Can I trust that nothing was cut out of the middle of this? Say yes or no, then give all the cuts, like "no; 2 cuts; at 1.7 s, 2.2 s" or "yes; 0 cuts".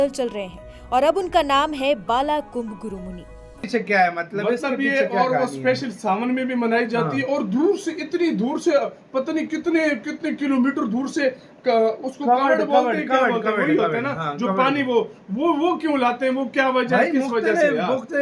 no; 1 cut; at 3.7 s